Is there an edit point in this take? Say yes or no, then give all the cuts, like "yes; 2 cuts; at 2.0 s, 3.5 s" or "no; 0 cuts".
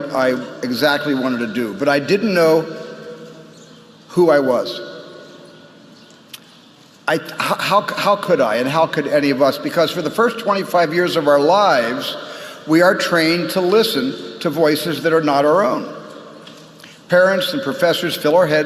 yes; 1 cut; at 3.9 s